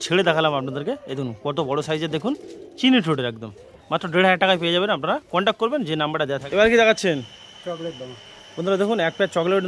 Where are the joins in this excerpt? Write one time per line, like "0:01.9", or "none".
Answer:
none